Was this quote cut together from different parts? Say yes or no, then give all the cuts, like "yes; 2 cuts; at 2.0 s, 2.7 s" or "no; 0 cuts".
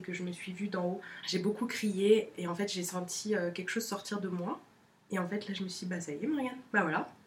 yes; 2 cuts; at 1.1 s, 2.3 s